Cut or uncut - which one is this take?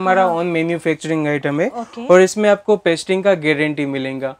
uncut